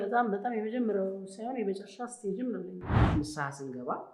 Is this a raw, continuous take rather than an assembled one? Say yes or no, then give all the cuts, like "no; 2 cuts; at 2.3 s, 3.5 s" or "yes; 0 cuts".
no; 1 cut; at 2.9 s